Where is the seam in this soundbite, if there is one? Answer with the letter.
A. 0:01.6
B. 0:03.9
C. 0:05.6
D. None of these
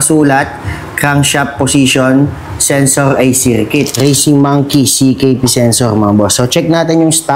B